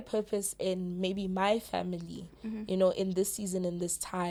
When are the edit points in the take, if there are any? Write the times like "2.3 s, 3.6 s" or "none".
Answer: none

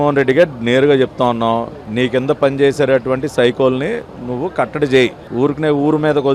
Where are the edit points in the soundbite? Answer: none

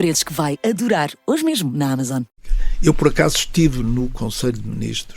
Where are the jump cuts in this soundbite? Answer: 2.4 s

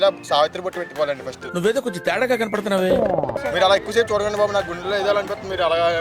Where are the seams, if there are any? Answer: 3.4 s

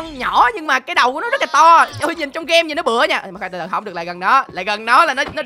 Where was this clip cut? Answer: none

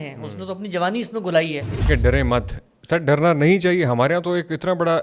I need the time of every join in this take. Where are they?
1.9 s

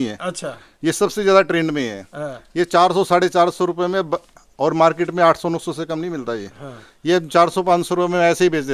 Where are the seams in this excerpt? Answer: none

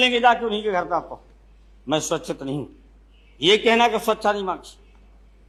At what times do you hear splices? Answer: none

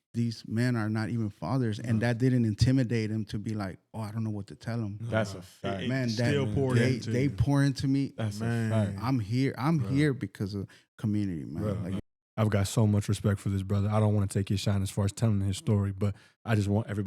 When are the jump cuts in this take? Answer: 12.0 s

